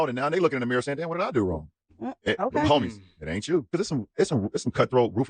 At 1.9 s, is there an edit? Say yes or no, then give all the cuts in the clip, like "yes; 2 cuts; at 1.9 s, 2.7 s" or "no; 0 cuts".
no; 1 cut; at 3.7 s